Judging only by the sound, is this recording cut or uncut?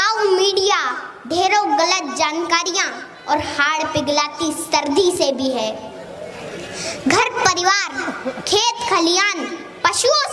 uncut